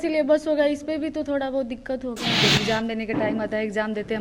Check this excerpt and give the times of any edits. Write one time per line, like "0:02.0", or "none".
0:02.4